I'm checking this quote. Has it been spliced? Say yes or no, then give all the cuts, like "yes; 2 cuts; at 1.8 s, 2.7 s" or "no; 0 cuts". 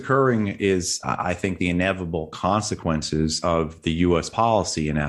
no; 0 cuts